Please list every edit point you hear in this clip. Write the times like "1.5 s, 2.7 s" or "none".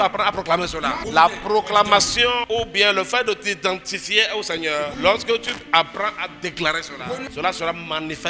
1.0 s, 2.4 s, 4.9 s, 5.6 s, 7.3 s